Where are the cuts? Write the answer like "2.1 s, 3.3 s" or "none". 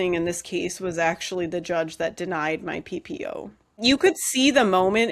3.8 s